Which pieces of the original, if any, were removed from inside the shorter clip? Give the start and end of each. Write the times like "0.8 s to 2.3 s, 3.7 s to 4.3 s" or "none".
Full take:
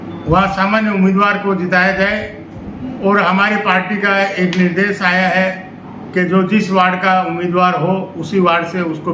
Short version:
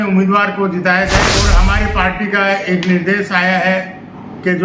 2.3 s to 3.2 s